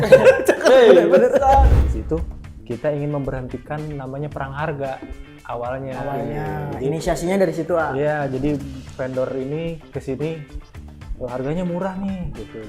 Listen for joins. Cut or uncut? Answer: cut